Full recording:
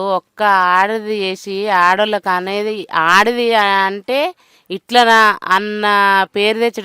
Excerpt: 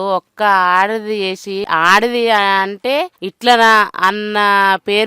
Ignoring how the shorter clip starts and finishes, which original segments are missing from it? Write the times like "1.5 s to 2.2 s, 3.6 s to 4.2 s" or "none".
1.6 s to 2.9 s, 4.5 s to 4.7 s